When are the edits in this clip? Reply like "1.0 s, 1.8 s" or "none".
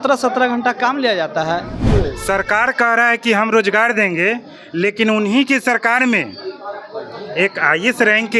1.9 s